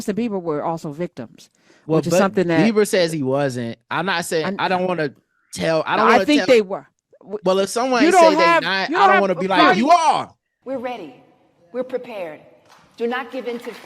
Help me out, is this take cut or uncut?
cut